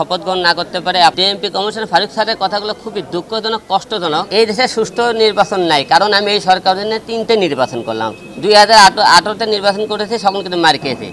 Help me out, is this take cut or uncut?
cut